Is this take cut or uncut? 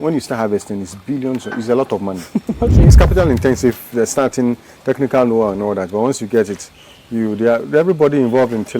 cut